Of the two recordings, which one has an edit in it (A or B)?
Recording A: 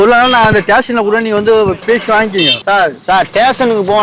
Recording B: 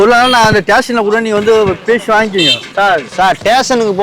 A